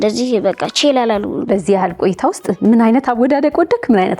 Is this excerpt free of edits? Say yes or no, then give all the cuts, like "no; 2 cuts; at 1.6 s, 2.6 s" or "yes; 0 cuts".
no; 1 cut; at 1.4 s